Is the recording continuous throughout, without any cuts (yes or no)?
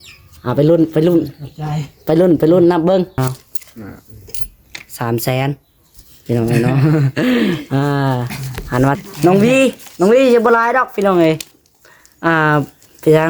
no